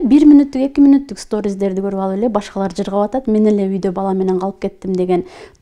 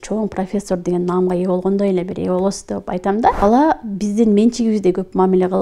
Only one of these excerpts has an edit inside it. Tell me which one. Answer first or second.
second